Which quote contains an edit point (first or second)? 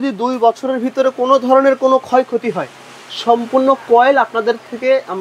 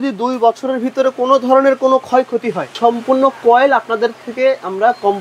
second